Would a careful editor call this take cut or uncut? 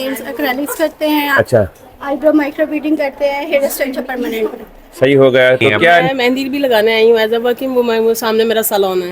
cut